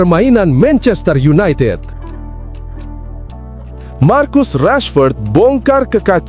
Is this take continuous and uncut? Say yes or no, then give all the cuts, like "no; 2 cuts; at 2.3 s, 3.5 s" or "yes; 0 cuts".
no; 2 cuts; at 2.3 s, 4.0 s